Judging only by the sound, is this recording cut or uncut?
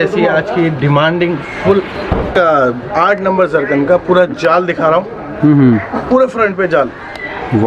cut